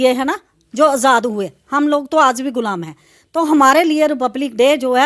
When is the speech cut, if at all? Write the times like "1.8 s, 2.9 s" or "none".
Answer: none